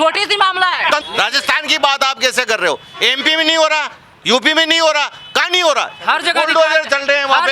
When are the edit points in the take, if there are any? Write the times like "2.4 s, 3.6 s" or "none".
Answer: 1.0 s